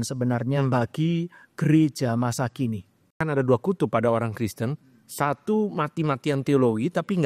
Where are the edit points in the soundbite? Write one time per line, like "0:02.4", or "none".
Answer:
0:03.1